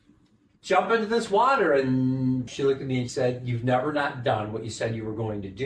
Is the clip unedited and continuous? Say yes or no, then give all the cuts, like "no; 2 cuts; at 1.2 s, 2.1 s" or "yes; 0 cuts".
no; 1 cut; at 2.6 s